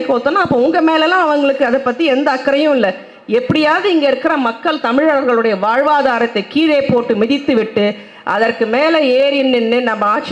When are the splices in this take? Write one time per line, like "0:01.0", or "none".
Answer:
none